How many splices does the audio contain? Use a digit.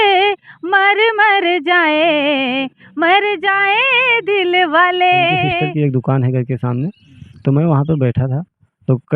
1